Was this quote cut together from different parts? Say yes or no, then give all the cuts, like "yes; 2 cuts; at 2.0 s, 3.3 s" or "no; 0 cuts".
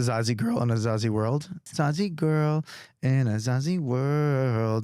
yes; 1 cut; at 1.6 s